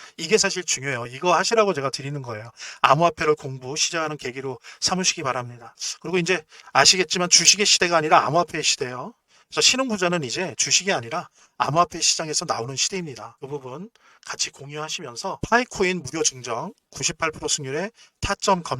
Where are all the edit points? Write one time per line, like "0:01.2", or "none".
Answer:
0:13.3